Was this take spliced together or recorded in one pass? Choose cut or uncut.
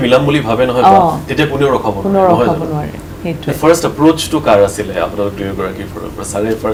uncut